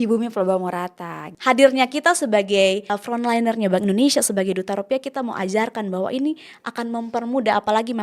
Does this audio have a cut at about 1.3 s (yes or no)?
yes